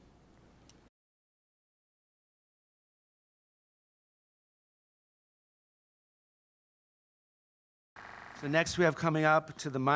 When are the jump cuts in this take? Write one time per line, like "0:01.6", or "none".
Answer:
none